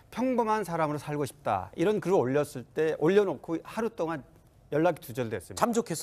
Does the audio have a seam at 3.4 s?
no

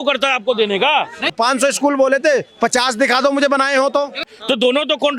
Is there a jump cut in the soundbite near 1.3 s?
yes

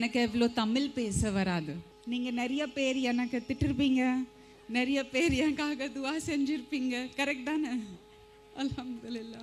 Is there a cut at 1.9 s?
yes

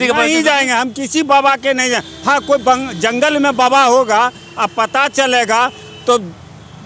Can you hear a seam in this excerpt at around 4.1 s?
no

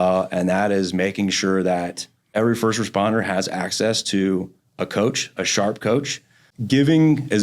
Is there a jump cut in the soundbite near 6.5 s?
yes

